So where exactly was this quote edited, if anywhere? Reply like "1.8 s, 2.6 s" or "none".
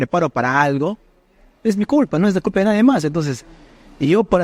none